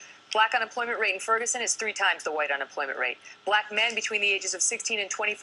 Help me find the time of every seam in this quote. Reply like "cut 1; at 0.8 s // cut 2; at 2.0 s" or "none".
cut 1; at 3.3 s